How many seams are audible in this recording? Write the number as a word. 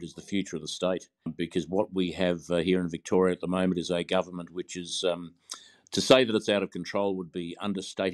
one